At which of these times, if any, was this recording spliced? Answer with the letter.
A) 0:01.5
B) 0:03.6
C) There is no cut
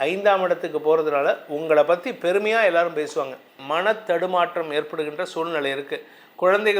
B